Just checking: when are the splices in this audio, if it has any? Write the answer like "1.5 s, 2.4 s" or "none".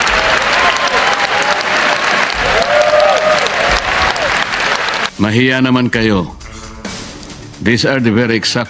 5.1 s